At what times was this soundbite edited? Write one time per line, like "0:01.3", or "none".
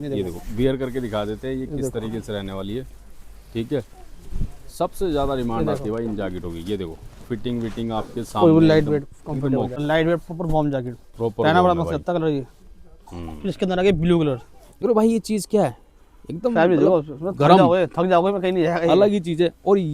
0:09.8
0:14.8